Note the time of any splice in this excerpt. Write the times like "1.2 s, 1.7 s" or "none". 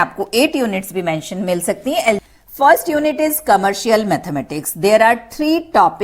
2.2 s

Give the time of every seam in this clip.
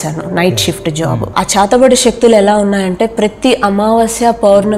1.3 s

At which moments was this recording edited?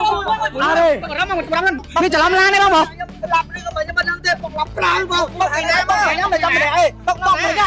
1.8 s

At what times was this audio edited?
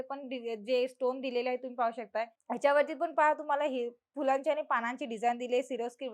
2.4 s

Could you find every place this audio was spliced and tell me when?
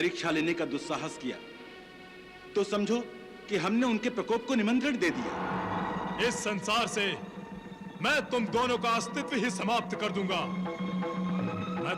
5.3 s

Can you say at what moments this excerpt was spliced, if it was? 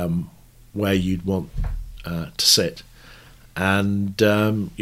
none

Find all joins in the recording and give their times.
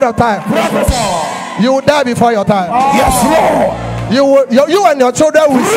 none

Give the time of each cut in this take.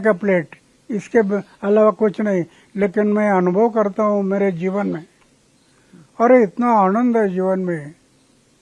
none

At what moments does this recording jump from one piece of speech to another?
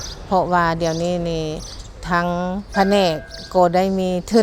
2.7 s

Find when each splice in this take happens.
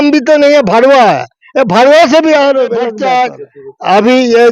3.0 s

